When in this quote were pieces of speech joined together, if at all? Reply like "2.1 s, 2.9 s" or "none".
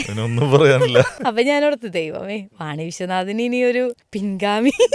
1.1 s, 4.1 s